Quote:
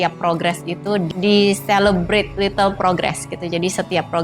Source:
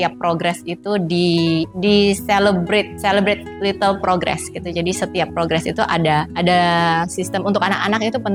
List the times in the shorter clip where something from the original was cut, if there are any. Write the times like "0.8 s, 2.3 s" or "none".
1.1 s, 2.3 s